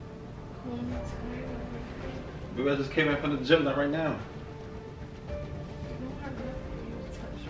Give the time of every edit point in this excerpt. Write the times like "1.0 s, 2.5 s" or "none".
5.4 s